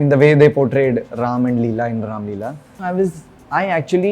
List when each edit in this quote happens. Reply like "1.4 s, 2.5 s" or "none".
2.8 s